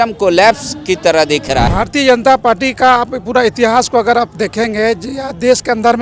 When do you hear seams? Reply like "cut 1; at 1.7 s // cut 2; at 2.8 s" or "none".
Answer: cut 1; at 1.7 s